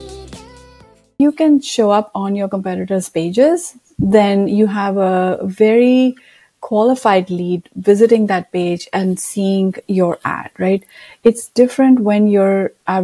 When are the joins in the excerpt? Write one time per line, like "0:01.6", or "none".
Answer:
0:01.1